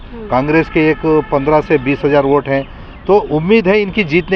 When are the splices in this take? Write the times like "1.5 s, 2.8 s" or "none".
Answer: none